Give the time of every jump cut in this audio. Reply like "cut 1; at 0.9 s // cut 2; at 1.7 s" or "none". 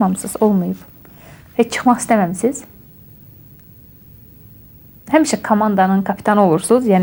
none